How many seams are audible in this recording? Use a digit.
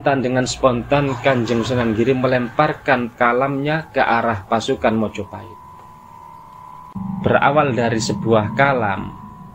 1